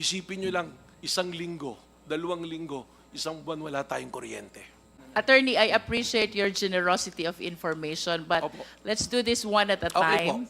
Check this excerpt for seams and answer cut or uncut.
cut